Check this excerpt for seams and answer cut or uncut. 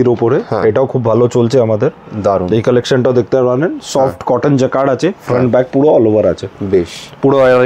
uncut